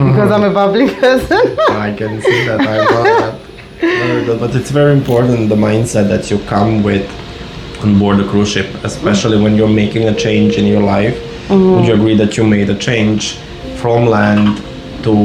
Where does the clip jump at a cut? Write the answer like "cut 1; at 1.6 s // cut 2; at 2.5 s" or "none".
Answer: none